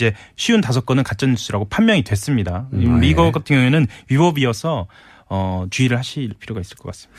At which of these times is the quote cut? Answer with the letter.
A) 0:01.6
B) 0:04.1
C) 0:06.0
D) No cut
D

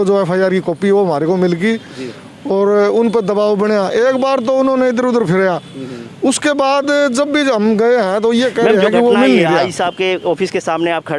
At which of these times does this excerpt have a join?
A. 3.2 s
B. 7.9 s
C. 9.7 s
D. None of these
C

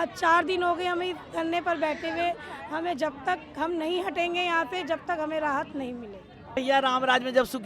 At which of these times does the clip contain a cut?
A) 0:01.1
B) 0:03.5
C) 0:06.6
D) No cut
C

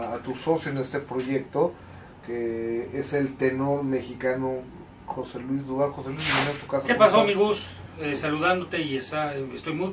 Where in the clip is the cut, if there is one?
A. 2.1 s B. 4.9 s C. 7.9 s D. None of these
A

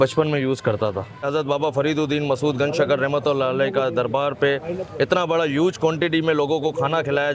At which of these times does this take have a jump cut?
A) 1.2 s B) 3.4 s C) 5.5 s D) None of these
A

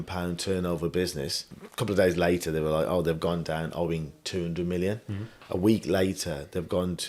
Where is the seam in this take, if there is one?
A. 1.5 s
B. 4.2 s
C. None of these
A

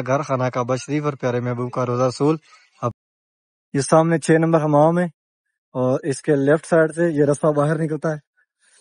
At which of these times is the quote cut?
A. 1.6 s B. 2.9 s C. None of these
B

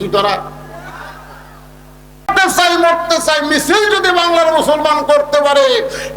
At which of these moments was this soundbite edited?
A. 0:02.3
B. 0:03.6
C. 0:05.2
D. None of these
A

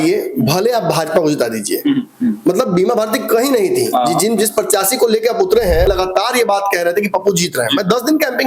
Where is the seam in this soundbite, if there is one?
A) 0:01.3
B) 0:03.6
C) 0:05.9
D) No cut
C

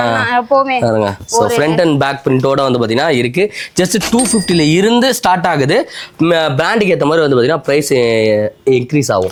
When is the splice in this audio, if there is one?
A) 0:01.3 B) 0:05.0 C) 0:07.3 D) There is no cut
D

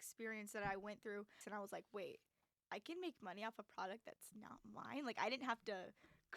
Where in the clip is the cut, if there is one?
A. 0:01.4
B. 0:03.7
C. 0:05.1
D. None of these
A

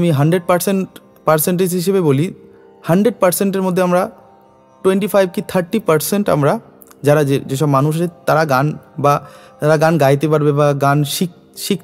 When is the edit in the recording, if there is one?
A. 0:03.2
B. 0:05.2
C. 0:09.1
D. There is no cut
D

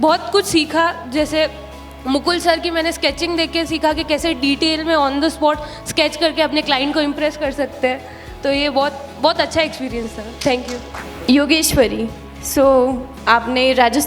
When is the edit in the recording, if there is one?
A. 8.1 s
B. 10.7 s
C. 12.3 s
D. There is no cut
D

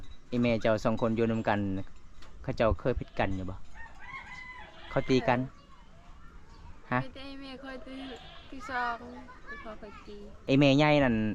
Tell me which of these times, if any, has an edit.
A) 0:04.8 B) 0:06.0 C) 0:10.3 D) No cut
C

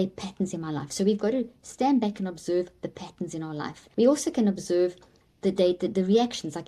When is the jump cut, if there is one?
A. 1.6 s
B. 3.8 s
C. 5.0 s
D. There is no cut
B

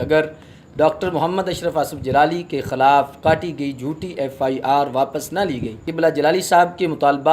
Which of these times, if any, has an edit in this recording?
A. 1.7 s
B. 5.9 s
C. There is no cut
B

